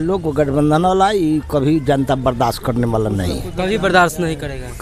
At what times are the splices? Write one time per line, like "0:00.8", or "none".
none